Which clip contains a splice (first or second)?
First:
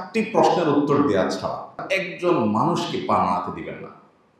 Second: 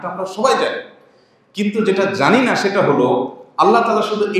first